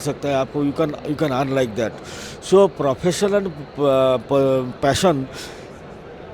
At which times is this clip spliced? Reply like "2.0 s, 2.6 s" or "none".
none